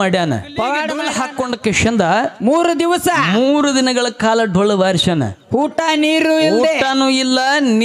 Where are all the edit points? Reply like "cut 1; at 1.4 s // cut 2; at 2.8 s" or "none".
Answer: cut 1; at 1.0 s